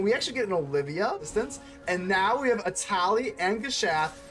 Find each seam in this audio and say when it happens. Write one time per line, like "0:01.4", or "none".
0:01.2